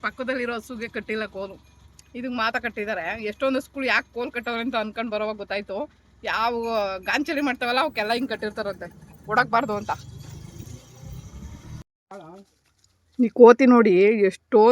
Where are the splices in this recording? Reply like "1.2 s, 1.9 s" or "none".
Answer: 11.8 s